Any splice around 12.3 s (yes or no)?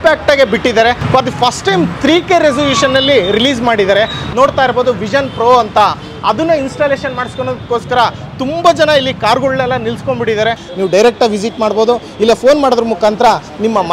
no